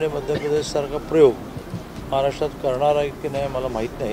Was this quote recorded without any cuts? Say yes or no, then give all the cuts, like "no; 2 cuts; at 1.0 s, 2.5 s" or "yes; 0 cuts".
yes; 0 cuts